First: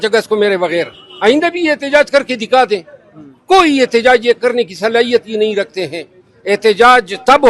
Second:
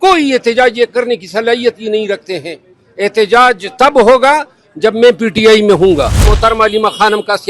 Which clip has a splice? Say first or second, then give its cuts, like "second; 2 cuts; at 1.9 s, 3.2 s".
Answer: second; 1 cut; at 6.2 s